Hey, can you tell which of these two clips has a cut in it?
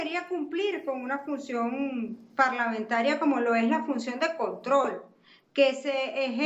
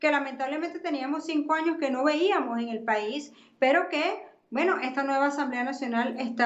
second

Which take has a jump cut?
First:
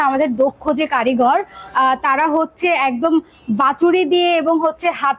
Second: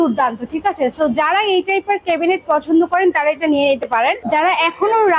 second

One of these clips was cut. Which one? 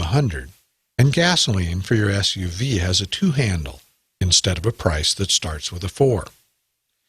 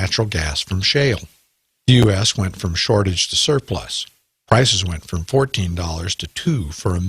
first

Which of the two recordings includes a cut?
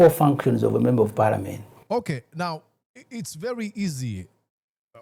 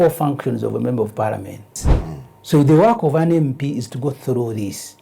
second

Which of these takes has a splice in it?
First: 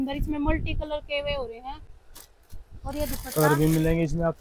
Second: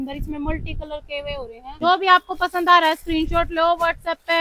second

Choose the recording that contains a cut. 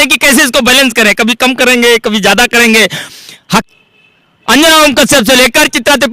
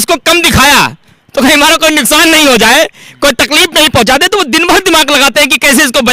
first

